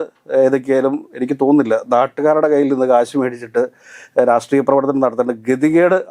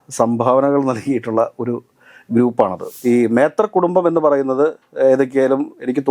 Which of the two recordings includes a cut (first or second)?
second